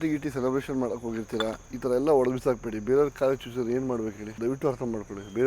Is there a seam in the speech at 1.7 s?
yes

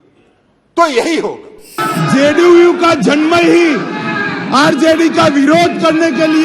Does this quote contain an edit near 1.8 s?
yes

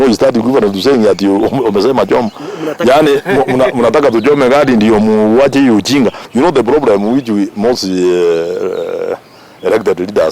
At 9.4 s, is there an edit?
no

